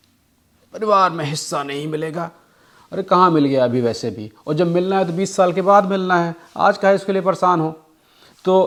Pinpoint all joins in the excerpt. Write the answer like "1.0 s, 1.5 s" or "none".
none